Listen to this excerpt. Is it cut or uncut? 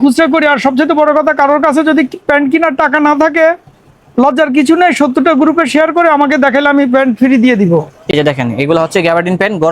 cut